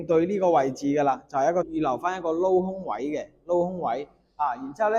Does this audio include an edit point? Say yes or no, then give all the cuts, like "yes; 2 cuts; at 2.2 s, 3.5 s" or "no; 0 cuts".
yes; 1 cut; at 1.7 s